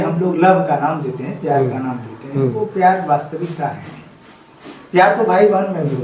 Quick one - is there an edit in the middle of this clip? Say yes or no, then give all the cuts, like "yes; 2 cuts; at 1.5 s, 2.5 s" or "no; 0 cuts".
no; 0 cuts